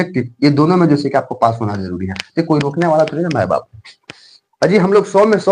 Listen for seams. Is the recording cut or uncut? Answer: uncut